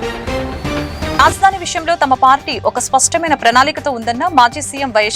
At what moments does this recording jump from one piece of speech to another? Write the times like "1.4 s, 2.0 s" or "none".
1.2 s